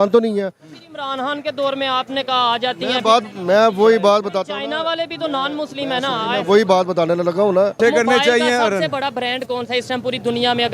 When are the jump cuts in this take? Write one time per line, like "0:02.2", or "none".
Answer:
0:07.8